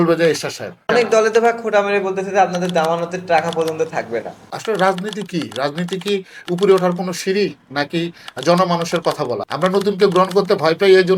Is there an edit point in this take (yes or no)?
yes